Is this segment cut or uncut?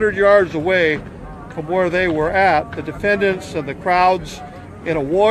uncut